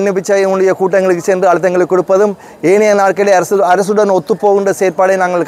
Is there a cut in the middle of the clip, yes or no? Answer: no